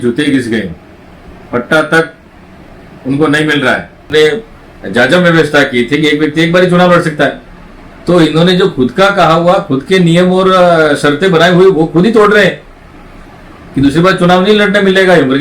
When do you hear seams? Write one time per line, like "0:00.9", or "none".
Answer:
0:04.1